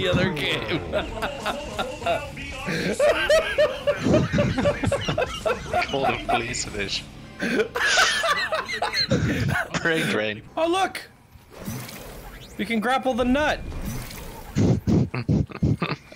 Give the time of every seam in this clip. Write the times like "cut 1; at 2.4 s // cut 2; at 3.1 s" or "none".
cut 1; at 10.4 s